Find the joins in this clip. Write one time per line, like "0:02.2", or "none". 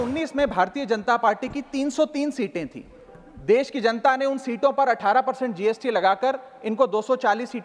none